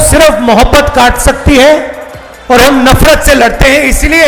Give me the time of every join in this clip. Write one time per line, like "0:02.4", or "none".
none